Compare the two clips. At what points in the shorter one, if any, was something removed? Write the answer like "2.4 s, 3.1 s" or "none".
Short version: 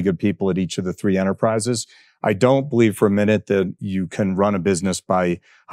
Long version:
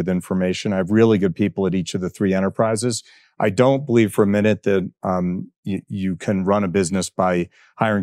3.8 s